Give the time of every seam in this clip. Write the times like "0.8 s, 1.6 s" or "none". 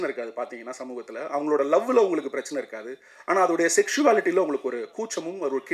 none